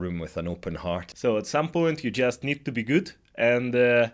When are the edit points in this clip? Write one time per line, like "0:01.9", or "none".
0:01.1